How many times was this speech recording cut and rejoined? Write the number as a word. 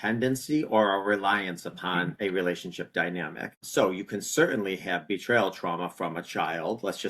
one